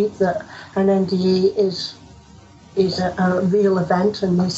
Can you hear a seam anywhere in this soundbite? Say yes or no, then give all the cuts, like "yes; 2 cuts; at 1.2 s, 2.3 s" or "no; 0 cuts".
no; 0 cuts